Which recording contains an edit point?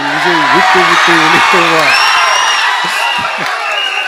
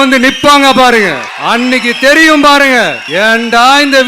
second; 2 cuts; at 1.3 s, 3.0 s

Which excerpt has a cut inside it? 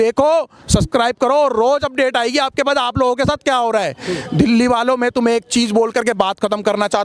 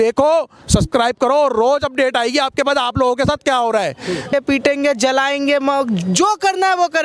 second; 1 cut; at 4.3 s

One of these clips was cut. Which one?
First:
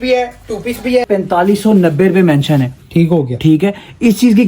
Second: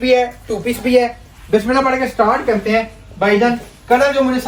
first; 1 cut; at 1.0 s

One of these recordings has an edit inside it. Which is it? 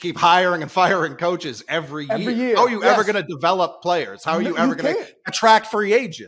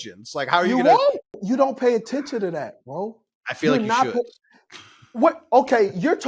second; 1 cut; at 1.4 s

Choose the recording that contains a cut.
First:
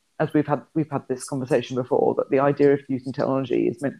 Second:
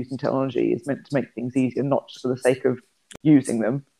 second; 1 cut; at 3.0 s

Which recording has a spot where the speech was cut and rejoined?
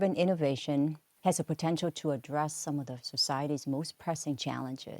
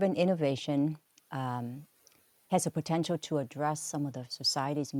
first; 1 cut; at 1.1 s

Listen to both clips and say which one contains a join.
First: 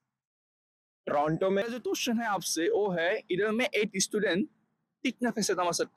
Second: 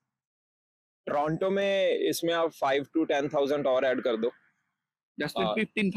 first; 1 cut; at 1.6 s

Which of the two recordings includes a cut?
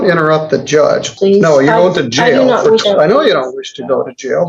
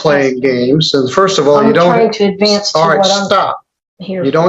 first; 2 cuts; at 1.1 s, 2.8 s

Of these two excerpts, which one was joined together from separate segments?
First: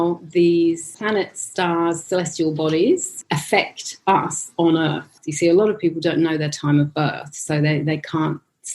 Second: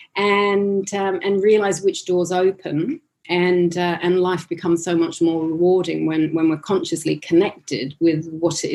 first; 3 cuts; at 0.9 s, 3.1 s, 5.2 s

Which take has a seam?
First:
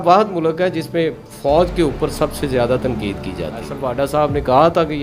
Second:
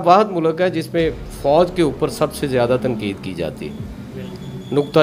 first; 1 cut; at 3.8 s

